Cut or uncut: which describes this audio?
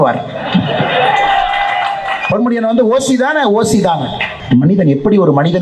cut